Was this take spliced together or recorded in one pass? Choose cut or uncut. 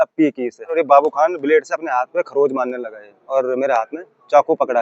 cut